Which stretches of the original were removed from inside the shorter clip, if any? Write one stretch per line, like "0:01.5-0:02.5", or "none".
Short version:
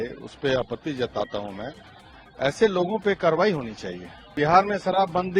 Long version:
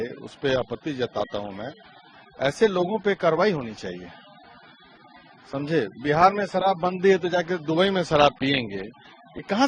0:04.3-0:05.9